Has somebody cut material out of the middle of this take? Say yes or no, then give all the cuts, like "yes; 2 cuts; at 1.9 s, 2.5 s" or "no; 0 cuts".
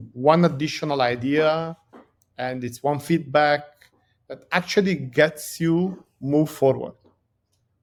no; 0 cuts